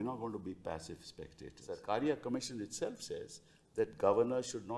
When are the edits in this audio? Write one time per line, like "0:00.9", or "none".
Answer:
0:01.7